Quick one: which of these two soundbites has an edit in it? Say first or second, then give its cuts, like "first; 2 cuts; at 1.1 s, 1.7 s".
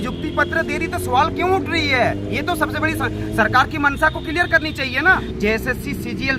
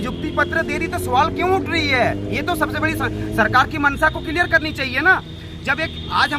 first; 1 cut; at 5.3 s